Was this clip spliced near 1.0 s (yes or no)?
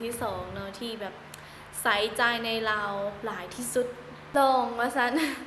no